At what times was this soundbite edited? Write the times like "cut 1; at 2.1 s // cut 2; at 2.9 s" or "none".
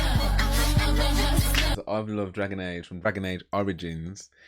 cut 1; at 1.7 s